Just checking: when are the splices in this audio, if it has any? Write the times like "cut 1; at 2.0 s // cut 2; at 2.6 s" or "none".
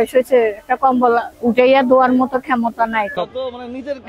cut 1; at 1.3 s // cut 2; at 3.1 s

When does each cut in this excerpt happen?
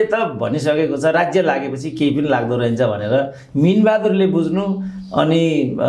none

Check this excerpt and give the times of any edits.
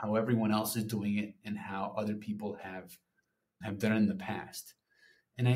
none

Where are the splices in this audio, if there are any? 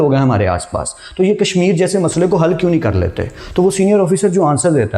none

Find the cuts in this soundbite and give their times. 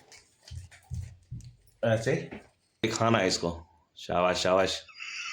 cut 1; at 2.8 s

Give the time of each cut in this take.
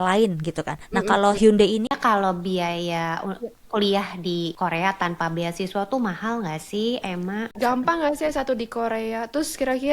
cut 1; at 1.9 s // cut 2; at 4.5 s // cut 3; at 7.5 s

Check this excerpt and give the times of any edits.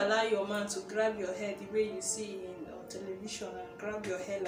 none

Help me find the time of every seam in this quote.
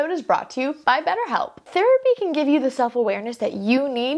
cut 1; at 1.7 s

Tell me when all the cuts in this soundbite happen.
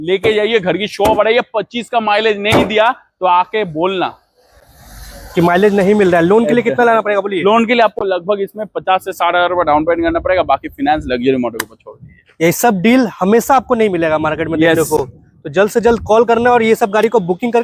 none

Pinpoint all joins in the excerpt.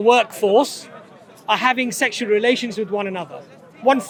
none

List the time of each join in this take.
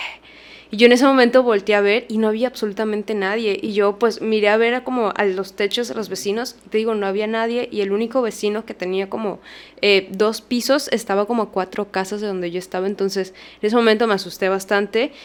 none

